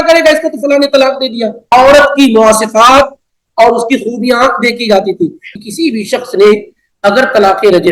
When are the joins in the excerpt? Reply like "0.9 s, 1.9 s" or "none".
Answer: 1.7 s, 5.4 s